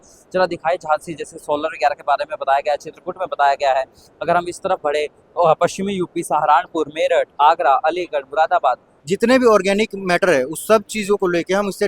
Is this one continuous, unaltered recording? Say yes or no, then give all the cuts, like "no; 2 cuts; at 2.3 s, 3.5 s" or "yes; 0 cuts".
no; 1 cut; at 8.9 s